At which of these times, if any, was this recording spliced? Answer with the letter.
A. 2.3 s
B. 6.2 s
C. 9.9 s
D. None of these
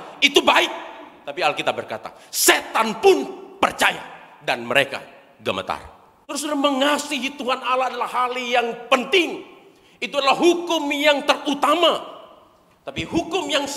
B